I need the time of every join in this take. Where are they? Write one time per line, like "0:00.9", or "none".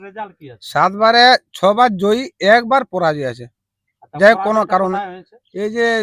none